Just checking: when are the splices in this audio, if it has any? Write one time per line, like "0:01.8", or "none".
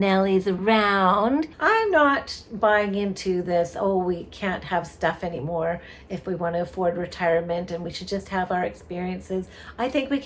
0:01.5

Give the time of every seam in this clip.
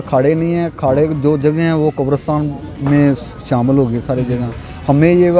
none

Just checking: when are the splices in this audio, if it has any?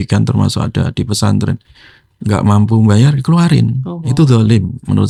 none

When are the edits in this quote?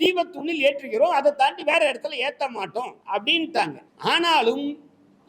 0:03.0
0:03.9

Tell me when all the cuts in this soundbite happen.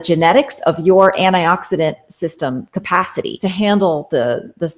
0:03.3

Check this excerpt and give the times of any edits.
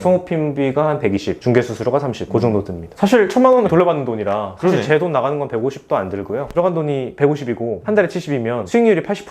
0:06.5

